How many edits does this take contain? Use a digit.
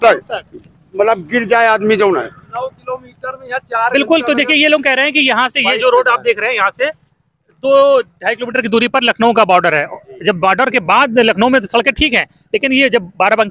0